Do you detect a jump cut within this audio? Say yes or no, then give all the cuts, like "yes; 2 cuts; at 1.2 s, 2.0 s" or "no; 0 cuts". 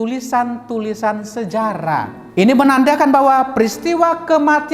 yes; 1 cut; at 2.2 s